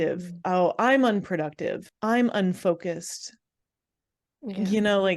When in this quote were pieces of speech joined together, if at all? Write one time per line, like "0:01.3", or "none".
0:01.9